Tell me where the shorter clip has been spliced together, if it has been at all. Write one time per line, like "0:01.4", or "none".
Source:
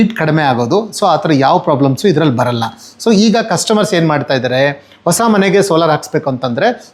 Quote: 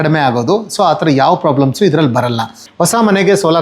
0:02.6

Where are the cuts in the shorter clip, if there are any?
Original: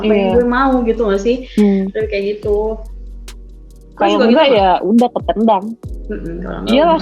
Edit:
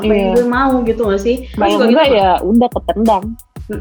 0:01.5

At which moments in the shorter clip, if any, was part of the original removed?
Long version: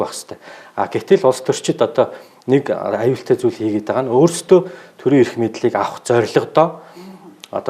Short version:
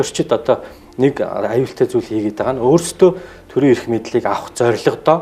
none

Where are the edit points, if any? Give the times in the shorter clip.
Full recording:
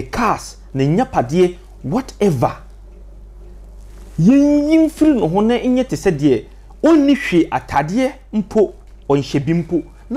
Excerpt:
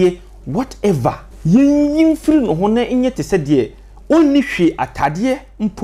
0:01.3

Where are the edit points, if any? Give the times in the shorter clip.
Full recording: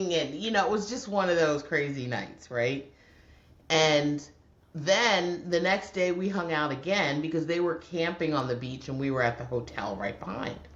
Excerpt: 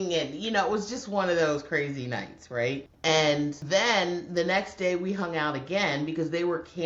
0:02.9
0:03.6

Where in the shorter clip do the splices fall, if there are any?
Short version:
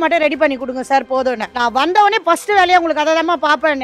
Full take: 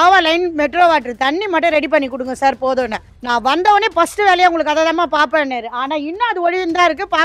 0:01.5

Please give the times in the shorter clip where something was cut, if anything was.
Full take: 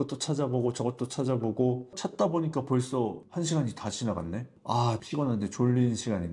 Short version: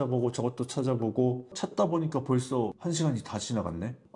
0:02.8

